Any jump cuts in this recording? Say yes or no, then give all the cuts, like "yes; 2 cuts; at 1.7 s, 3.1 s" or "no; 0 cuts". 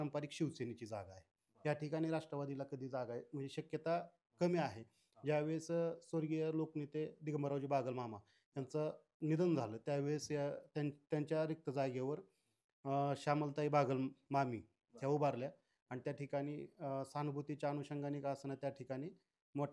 no; 0 cuts